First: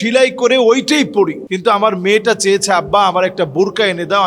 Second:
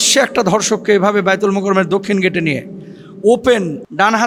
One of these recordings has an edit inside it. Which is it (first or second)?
first